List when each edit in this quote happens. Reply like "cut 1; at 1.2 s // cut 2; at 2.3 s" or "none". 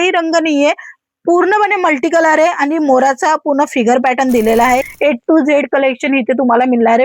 cut 1; at 4.9 s